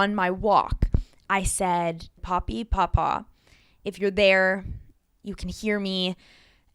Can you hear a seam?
yes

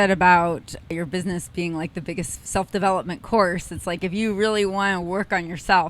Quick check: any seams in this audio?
yes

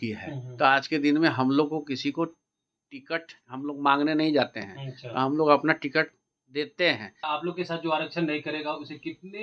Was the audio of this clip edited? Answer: yes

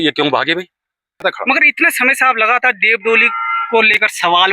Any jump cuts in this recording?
yes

